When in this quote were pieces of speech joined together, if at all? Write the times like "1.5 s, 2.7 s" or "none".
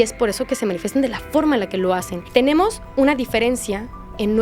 2.2 s